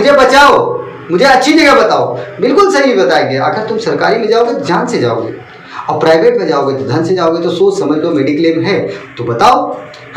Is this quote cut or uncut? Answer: uncut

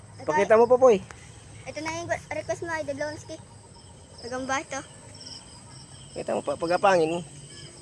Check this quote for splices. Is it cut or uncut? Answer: uncut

